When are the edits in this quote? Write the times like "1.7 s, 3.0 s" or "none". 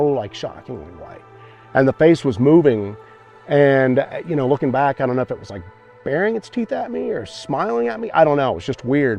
none